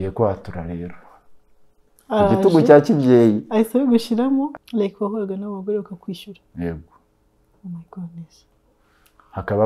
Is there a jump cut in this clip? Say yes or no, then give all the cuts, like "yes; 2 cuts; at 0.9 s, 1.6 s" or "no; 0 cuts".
yes; 1 cut; at 4.6 s